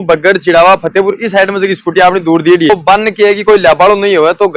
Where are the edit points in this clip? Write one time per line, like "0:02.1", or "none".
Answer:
0:02.7